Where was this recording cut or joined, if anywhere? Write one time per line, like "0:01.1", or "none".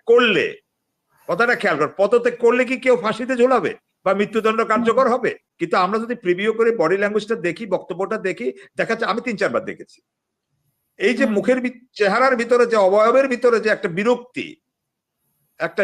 0:05.5